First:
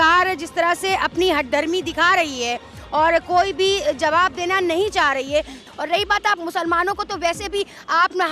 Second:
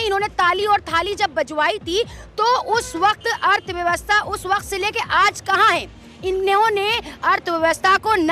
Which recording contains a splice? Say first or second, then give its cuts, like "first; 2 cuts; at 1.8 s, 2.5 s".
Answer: first; 1 cut; at 5.6 s